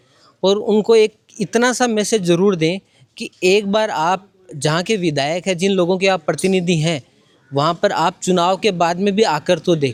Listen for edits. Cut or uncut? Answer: uncut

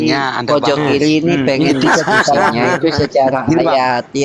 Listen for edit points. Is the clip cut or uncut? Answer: uncut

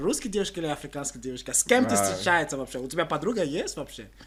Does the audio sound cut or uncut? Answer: uncut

